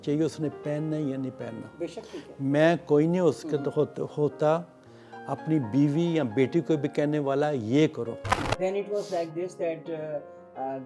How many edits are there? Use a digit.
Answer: 1